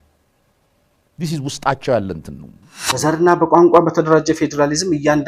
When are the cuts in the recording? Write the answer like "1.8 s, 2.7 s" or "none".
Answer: 3.0 s

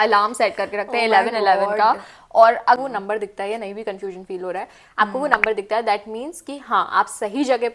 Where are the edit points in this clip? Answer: 2.8 s

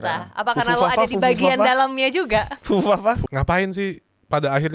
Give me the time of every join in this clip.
3.2 s

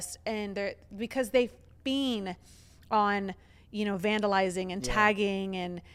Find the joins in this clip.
none

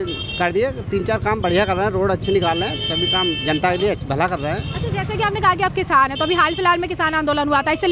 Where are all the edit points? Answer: none

